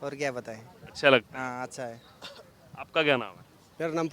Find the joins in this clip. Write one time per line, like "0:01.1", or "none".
none